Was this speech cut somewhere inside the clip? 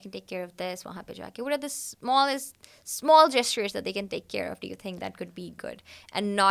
no; 0 cuts

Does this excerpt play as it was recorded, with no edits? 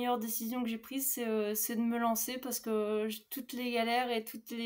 yes; 0 cuts

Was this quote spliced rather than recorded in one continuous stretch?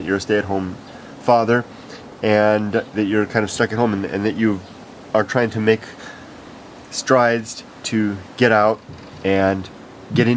no; 0 cuts

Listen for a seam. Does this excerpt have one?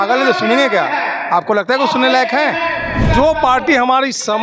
yes; 1 cut; at 3.1 s

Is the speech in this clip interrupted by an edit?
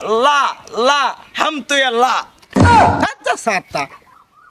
no; 0 cuts

